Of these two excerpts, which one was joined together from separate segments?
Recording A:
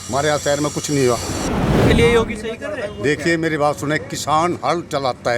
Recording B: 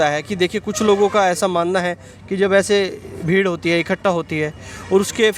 A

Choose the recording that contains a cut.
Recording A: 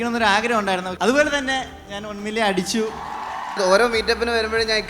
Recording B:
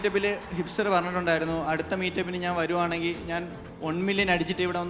A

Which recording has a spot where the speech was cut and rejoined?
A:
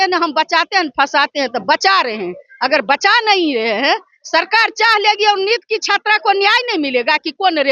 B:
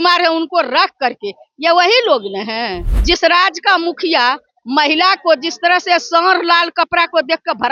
B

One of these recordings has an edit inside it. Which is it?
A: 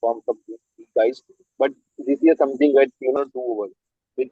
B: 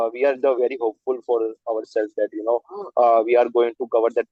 A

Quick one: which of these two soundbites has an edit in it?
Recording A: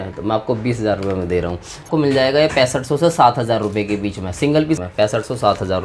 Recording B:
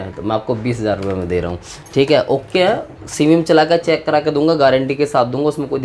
A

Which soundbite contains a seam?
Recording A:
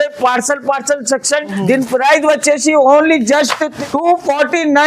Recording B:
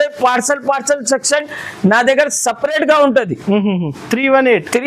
A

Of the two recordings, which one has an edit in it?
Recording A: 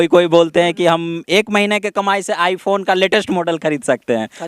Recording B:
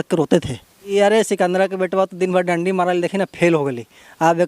B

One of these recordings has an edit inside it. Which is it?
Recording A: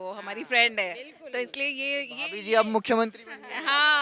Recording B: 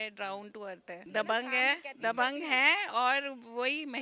B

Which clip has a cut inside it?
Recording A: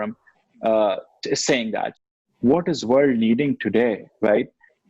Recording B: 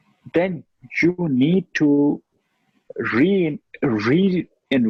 A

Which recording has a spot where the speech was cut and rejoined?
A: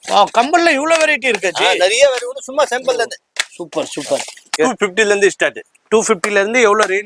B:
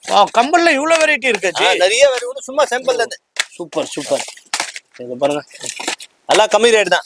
A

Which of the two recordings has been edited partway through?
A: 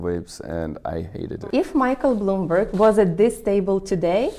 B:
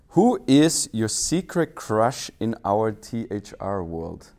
A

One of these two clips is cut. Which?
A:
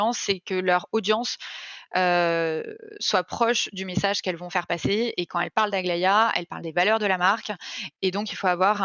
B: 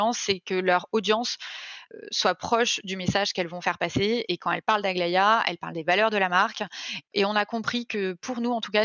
B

